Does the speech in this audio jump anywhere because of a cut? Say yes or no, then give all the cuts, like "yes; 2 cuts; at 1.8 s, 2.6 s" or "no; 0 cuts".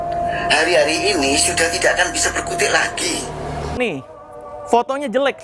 yes; 1 cut; at 3.8 s